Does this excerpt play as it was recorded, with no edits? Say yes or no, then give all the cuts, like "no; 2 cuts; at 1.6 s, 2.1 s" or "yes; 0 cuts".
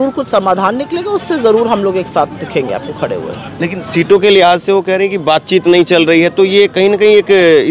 yes; 0 cuts